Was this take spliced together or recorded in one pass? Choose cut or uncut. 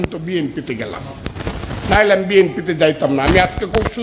uncut